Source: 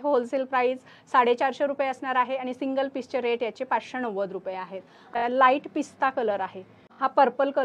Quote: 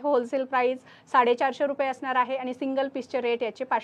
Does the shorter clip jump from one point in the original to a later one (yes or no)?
no